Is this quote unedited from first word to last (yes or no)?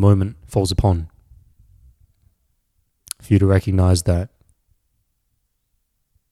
yes